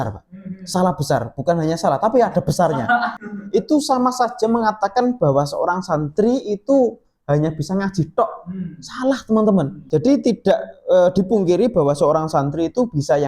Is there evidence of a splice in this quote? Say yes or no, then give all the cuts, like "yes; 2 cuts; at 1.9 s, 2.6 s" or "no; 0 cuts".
yes; 2 cuts; at 3.2 s, 9.8 s